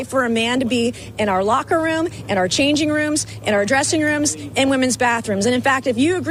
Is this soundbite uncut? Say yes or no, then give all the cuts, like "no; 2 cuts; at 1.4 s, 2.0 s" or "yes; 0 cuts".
yes; 0 cuts